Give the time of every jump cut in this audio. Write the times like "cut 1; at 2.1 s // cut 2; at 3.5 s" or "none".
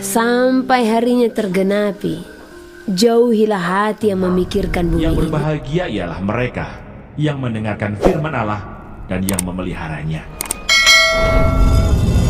cut 1; at 5.2 s